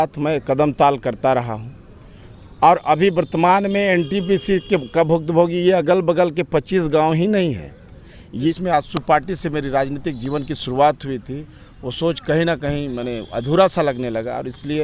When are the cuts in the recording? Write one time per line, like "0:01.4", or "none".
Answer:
0:08.6